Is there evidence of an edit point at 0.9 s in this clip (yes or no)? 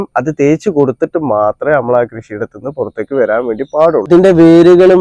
no